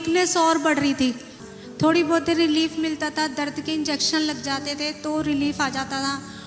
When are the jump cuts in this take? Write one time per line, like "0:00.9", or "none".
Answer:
0:01.3

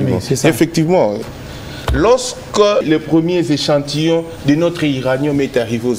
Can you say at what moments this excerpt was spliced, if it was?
0:01.2
0:02.8

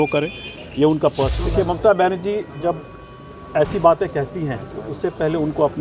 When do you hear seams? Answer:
0:01.4

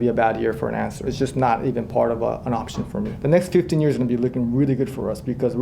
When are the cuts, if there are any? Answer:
0:01.0
0:03.1

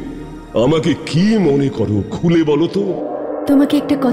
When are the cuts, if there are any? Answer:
0:03.1

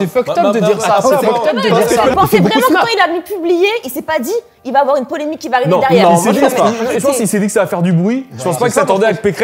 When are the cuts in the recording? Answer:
0:02.1

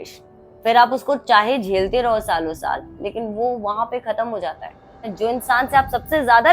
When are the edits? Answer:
0:05.0

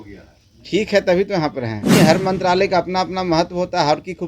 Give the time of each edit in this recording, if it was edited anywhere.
0:01.9

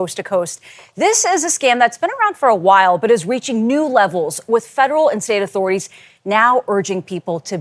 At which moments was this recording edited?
none

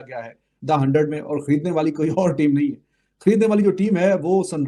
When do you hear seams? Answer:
none

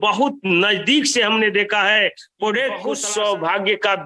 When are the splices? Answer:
0:02.9

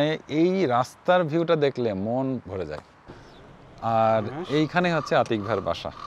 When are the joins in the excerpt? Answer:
0:03.1

